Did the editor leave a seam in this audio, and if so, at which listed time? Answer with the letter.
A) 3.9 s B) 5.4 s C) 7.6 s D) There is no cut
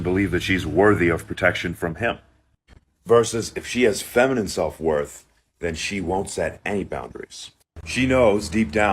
A